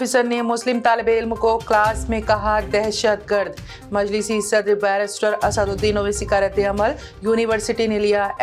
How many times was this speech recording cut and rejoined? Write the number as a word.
zero